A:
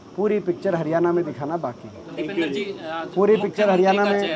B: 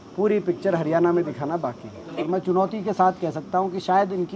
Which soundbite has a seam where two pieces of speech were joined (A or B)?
B